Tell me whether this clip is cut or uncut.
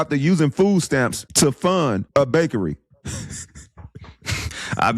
cut